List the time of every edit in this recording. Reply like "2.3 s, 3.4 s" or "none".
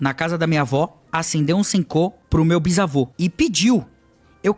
2.2 s, 3.1 s